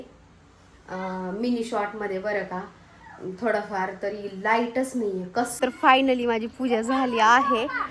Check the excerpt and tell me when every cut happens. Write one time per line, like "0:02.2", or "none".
0:05.5